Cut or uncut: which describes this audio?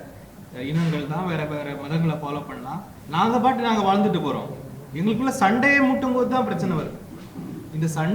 cut